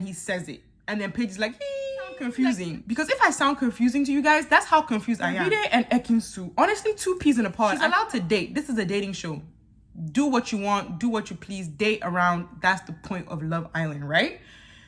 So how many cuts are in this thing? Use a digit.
3